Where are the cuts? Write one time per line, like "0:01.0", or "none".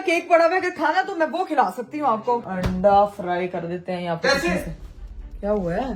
0:02.4